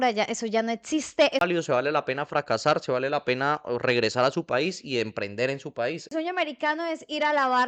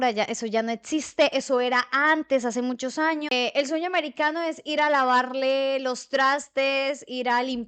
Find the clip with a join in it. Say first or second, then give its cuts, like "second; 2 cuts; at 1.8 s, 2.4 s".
first; 2 cuts; at 1.4 s, 6.1 s